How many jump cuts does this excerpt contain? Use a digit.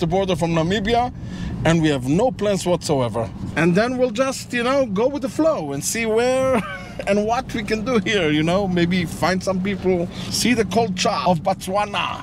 3